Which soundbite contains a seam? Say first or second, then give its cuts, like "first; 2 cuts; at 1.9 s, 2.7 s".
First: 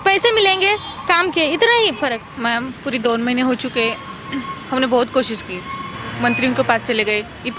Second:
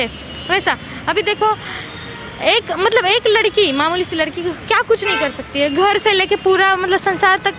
first; 1 cut; at 2.3 s